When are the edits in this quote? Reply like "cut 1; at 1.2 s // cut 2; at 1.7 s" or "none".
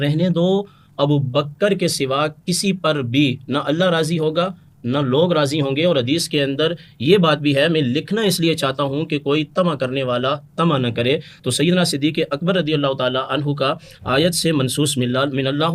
none